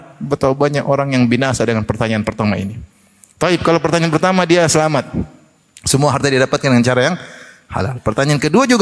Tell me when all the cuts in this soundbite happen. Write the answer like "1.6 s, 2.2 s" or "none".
none